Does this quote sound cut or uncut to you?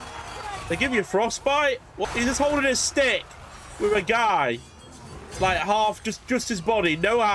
cut